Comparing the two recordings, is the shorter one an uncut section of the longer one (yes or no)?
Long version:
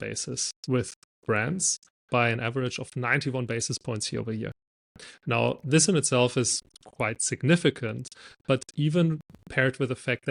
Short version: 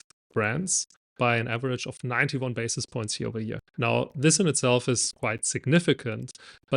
no